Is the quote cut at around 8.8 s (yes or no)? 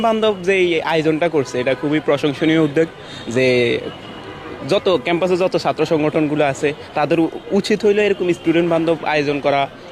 no